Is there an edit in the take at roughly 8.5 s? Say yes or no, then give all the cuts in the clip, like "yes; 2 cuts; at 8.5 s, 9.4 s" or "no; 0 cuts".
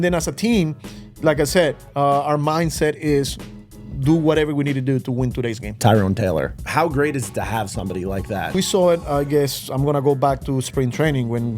yes; 3 cuts; at 5.8 s, 6.6 s, 8.5 s